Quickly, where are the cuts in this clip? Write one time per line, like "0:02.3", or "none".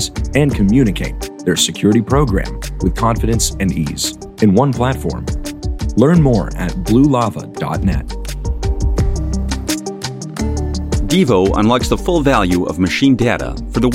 0:08.5
0:11.1